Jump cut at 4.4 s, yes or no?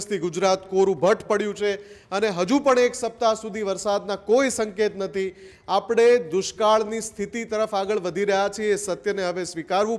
no